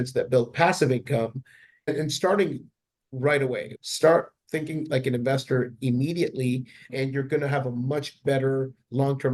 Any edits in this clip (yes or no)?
yes